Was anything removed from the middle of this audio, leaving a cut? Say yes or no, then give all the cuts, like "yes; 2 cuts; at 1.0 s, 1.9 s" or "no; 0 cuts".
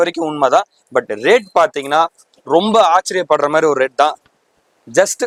no; 0 cuts